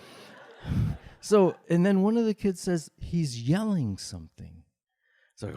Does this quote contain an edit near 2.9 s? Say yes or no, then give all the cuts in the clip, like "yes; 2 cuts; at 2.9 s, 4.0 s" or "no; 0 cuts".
no; 1 cut; at 1.6 s